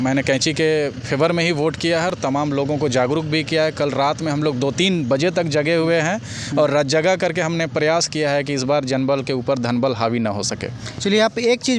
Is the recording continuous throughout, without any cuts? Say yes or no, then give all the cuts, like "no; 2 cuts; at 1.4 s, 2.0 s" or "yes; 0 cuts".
yes; 0 cuts